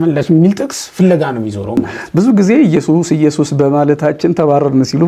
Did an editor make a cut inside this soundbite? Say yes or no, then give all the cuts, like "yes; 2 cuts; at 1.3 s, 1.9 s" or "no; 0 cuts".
yes; 1 cut; at 1.8 s